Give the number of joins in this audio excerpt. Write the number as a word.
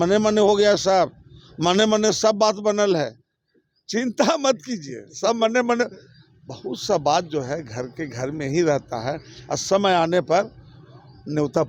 zero